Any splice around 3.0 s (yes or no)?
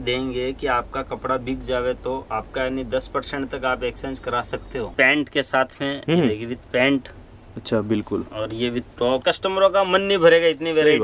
no